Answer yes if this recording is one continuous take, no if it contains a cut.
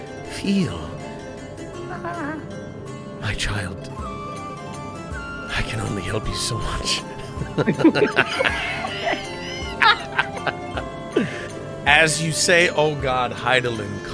no